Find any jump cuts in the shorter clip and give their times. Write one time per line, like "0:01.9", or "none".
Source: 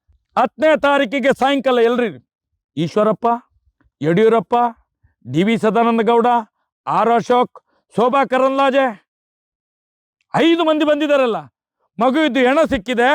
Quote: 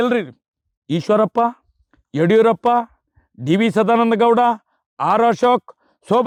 none